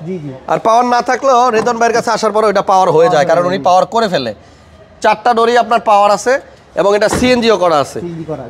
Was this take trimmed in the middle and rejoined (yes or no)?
no